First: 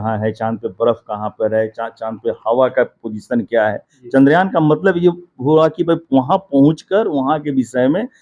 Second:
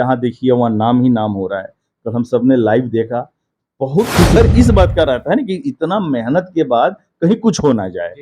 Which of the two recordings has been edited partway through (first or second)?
second